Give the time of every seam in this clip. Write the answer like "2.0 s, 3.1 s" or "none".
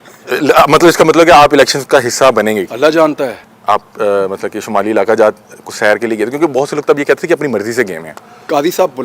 3.5 s